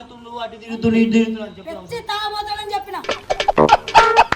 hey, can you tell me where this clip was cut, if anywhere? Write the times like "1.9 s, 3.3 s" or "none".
3.1 s